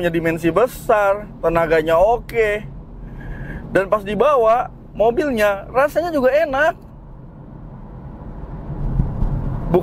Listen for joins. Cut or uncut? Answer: uncut